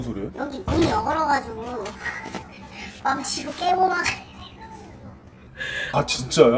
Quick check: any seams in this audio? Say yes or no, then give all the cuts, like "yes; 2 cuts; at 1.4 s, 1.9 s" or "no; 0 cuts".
no; 0 cuts